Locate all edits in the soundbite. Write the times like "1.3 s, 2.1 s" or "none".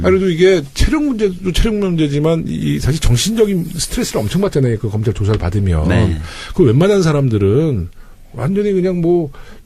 1.0 s